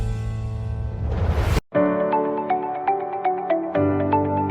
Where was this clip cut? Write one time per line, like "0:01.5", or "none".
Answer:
0:01.6